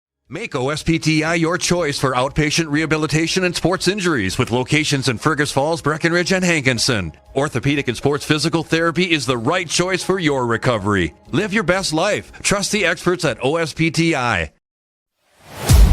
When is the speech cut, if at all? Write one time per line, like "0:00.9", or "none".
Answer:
0:01.1